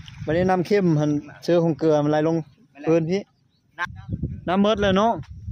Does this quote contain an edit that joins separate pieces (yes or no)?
yes